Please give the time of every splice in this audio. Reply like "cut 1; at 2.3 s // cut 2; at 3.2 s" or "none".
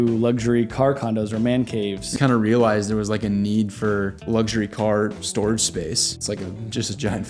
cut 1; at 2.1 s // cut 2; at 4.2 s // cut 3; at 6.1 s